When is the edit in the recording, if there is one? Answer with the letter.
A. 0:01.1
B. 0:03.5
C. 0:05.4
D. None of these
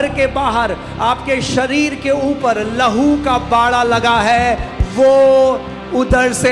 D